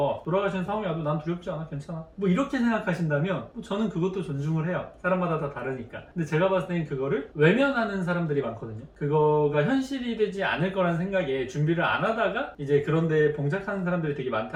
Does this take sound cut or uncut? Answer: uncut